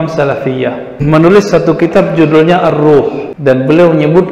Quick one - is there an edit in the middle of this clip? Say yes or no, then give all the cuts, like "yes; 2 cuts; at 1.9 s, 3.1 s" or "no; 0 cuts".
yes; 2 cuts; at 1.0 s, 3.3 s